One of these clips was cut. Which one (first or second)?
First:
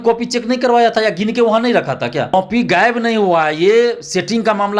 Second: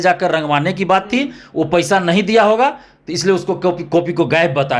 first